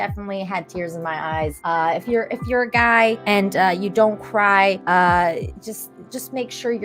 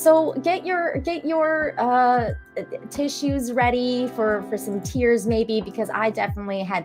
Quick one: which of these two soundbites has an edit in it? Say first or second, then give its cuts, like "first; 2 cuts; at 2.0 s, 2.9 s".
first; 3 cuts; at 1.6 s, 3.2 s, 4.8 s